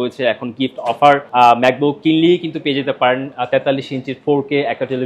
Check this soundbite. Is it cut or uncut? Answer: cut